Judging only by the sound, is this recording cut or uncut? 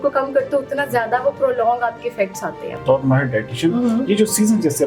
cut